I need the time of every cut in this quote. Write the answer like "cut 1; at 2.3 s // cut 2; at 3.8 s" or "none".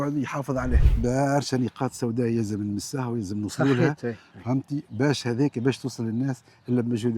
cut 1; at 1.0 s